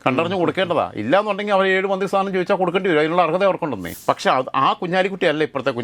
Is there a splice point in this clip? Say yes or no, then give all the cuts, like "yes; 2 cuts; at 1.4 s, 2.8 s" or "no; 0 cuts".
yes; 1 cut; at 3.9 s